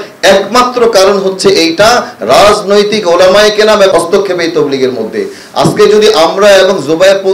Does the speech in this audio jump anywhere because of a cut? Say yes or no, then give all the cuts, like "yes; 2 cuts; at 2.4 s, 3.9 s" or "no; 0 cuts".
yes; 1 cut; at 3.9 s